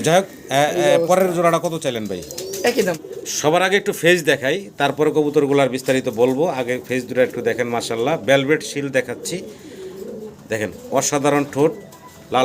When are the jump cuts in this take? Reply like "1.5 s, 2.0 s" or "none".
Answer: 3.0 s

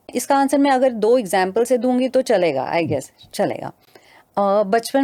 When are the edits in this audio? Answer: none

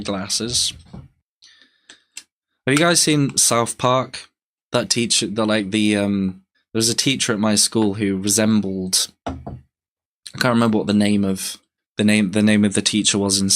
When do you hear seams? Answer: none

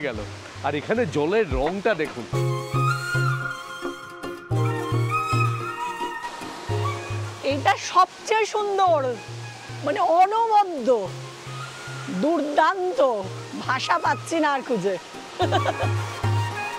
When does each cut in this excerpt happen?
2.2 s, 7.2 s, 15.9 s

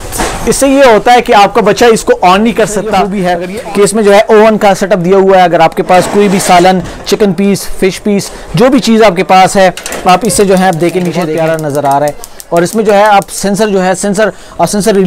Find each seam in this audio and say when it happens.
3.1 s, 11.3 s

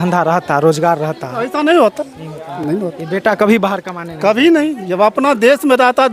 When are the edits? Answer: none

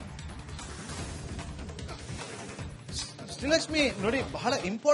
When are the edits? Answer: 1.6 s, 3.0 s

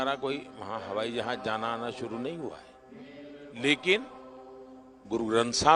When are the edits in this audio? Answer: none

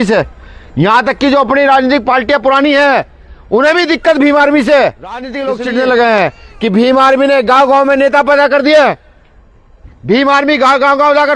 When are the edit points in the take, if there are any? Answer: 5.4 s

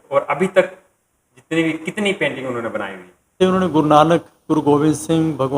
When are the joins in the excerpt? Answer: 3.3 s

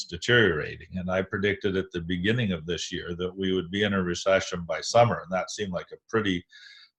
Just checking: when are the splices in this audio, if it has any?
none

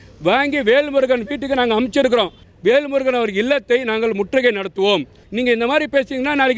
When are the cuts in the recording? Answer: 2.4 s, 5.2 s

